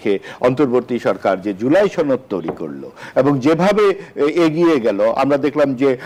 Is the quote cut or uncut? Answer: uncut